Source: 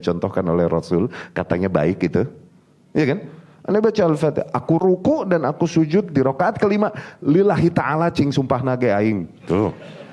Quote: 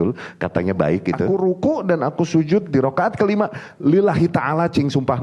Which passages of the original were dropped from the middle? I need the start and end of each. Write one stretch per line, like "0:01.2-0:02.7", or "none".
0:02.3-0:04.8